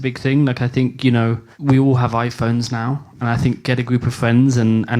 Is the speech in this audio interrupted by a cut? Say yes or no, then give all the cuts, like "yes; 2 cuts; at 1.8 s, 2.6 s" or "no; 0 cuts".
yes; 1 cut; at 1.5 s